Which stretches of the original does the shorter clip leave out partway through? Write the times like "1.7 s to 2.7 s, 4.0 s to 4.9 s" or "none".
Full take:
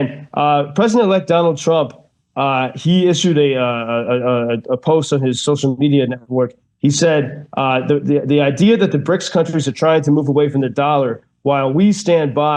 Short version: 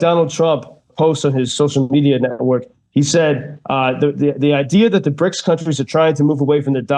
2.2 s to 4.8 s